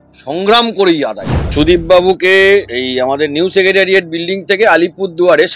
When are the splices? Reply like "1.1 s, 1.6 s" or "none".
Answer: 1.5 s, 2.7 s